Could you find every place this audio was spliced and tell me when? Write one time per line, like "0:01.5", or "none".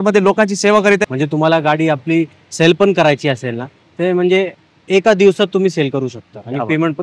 0:01.1